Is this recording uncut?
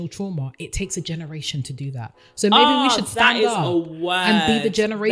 yes; 0 cuts

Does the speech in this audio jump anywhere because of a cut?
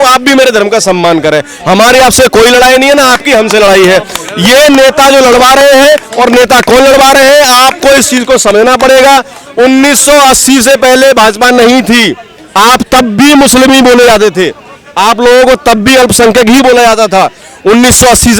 no; 0 cuts

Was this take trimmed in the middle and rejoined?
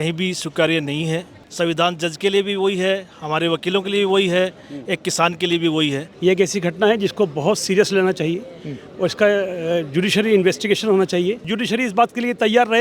yes; 3 cuts; at 1.4 s, 6.1 s, 11.5 s

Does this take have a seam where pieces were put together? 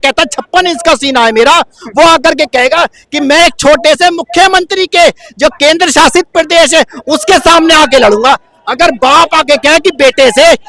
no; 0 cuts

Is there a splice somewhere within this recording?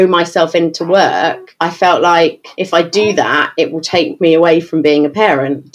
yes; 2 cuts; at 1.5 s, 2.5 s

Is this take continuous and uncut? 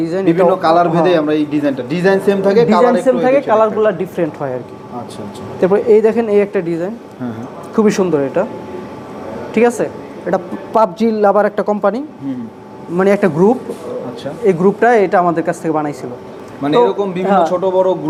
yes; 0 cuts

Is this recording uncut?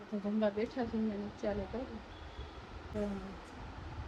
no; 1 cut; at 2.8 s

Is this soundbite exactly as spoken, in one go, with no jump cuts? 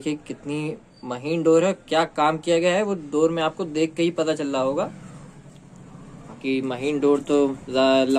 yes; 0 cuts

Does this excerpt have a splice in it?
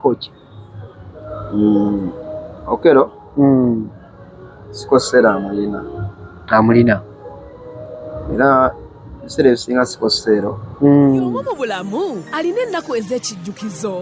yes; 1 cut; at 11.5 s

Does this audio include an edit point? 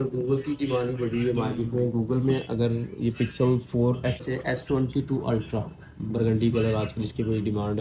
yes; 1 cut; at 3.8 s

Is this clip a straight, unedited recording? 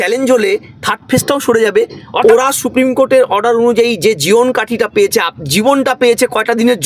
no; 1 cut; at 2.2 s

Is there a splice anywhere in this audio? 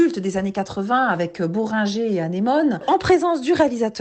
yes; 1 cut; at 2.8 s

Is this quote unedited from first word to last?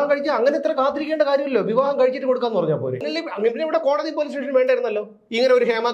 no; 1 cut; at 3.2 s

